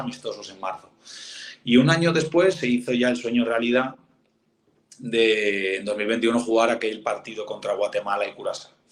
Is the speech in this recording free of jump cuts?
yes; 0 cuts

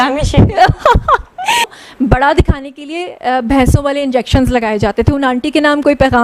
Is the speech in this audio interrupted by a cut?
yes; 1 cut; at 1.7 s

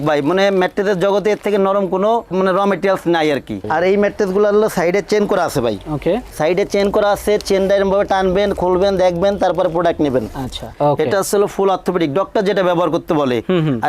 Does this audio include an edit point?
yes; 2 cuts; at 3.6 s, 10.7 s

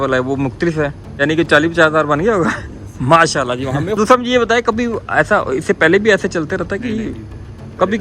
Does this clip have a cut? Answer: yes; 1 cut; at 1.2 s

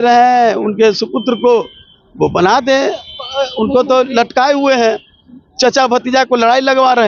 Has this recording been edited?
no; 0 cuts

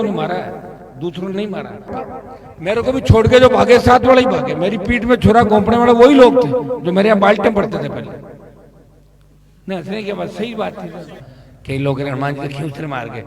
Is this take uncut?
no; 2 cuts; at 2.0 s, 11.2 s

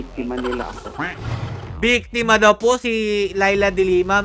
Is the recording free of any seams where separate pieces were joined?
yes; 0 cuts

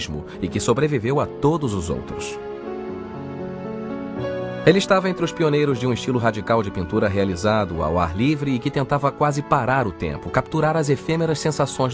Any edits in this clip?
yes; 1 cut; at 1.0 s

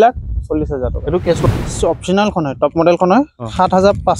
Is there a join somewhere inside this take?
yes; 1 cut; at 1.5 s

